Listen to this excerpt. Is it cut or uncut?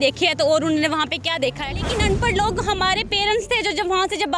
cut